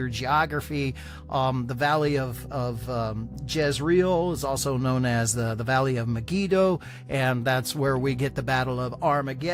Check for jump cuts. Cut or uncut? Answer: uncut